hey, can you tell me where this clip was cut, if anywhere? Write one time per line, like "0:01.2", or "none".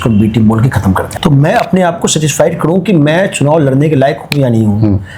0:01.1